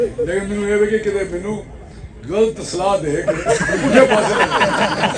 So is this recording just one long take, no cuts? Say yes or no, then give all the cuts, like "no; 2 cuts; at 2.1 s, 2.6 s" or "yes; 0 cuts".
yes; 0 cuts